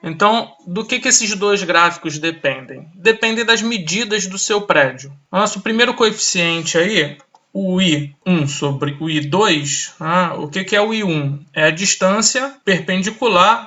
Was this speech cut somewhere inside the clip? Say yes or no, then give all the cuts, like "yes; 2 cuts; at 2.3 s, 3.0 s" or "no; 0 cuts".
yes; 3 cuts; at 5.1 s, 8.1 s, 12.5 s